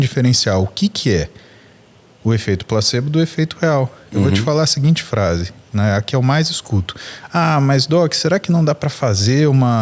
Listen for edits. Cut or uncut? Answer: uncut